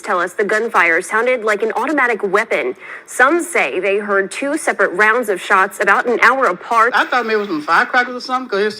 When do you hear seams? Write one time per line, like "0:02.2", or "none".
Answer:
0:06.9